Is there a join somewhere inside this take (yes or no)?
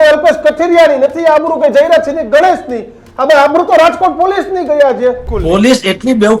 yes